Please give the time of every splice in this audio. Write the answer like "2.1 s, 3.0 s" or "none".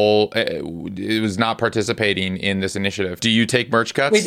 3.1 s